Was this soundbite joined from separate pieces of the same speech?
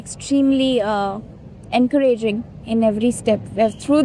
no; 0 cuts

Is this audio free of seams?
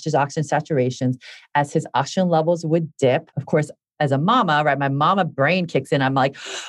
no; 2 cuts; at 3.3 s, 5.3 s

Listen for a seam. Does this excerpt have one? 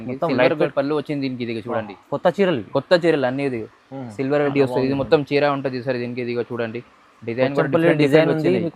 yes; 1 cut; at 4.5 s

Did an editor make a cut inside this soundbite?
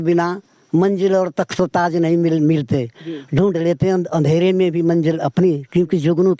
no; 0 cuts

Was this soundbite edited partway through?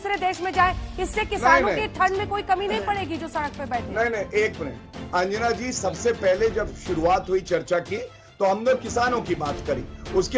no; 0 cuts

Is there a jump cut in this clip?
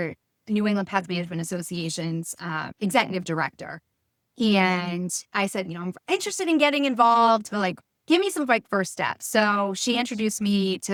no; 0 cuts

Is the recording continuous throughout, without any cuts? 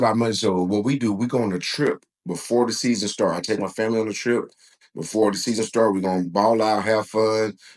yes; 0 cuts

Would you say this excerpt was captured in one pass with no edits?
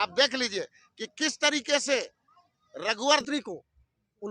no; 1 cut; at 3.2 s

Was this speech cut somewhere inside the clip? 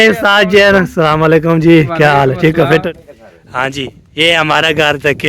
yes; 1 cut; at 2.8 s

